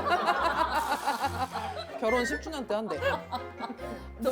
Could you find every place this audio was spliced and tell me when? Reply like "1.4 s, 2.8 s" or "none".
1.9 s